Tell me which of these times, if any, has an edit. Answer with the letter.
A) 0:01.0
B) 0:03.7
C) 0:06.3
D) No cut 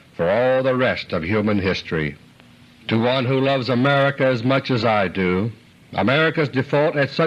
C